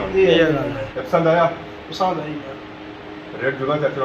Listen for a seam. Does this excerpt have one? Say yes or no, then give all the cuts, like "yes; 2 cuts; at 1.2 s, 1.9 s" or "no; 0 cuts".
yes; 1 cut; at 0.9 s